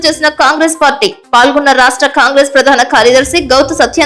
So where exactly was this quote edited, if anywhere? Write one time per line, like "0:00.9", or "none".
none